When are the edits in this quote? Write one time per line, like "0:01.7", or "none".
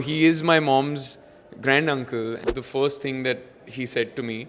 0:02.4